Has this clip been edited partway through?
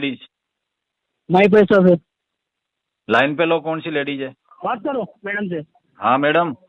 yes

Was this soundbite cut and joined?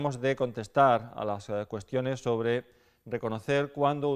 no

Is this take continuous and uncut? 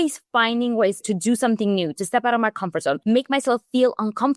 no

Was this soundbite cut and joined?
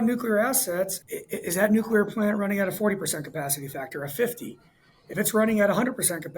yes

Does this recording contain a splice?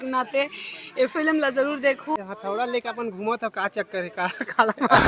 yes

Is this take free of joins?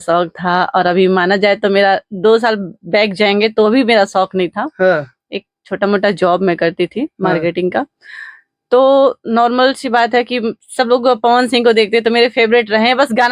yes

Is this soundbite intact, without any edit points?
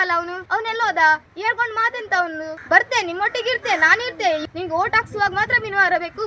no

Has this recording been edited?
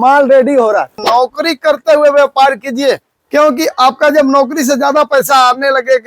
yes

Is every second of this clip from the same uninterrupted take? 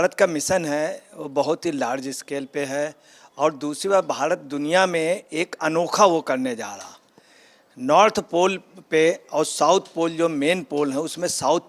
yes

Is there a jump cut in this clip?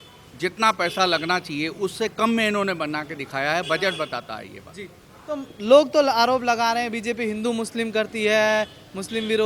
no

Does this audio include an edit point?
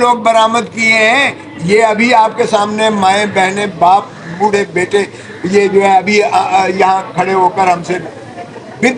no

